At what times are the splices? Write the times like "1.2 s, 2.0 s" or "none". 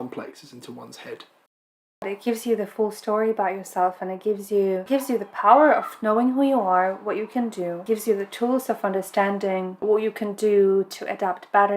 2.1 s, 4.8 s, 7.8 s, 9.8 s